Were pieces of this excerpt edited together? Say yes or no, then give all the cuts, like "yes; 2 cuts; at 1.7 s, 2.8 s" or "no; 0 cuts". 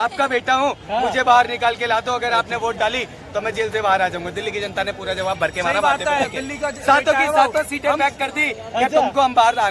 no; 0 cuts